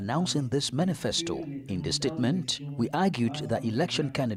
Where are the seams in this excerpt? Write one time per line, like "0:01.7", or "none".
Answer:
none